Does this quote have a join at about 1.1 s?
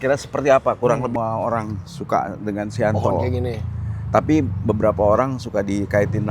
yes; 1 cut; at 1.1 s

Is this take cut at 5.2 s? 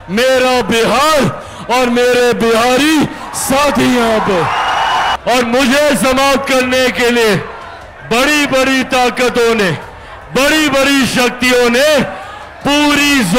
yes; 1 cut; at 5.2 s

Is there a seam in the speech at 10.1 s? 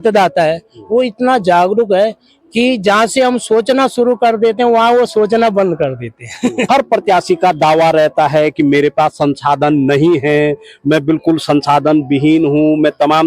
no; 1 cut; at 6.6 s

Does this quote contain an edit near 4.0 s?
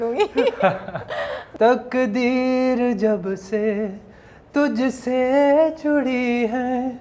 no; 1 cut; at 1.4 s

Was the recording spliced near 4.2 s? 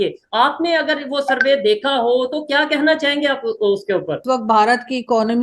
yes; 1 cut; at 4.2 s

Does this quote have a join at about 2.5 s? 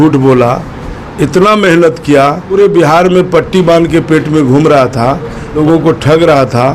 yes; 2 cuts; at 2.5 s, 5.6 s

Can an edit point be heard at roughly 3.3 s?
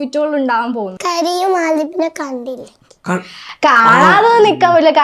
no; 1 cut; at 0.9 s

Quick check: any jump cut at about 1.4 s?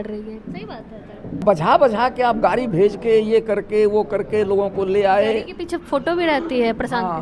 yes; 1 cut; at 1.4 s

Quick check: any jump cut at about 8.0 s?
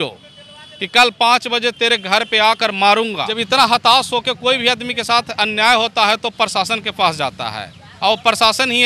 no; 1 cut; at 3.3 s

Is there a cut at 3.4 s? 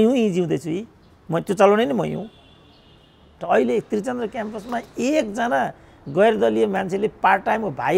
yes; 1 cut; at 3.4 s

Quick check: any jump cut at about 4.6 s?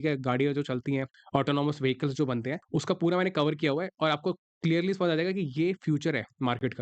no; 2 cuts; at 1.2 s, 2.6 s

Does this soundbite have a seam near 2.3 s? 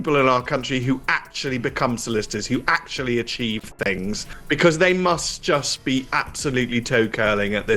no; 1 cut; at 4.3 s

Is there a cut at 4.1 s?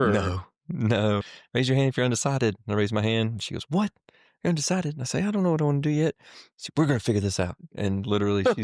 no; 1 cut; at 1.4 s

